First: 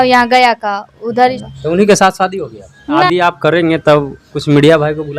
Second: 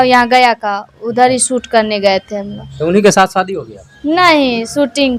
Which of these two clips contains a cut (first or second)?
first